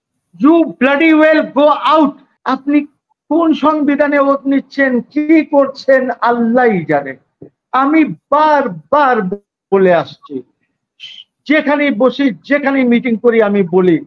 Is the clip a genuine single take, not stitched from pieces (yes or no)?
no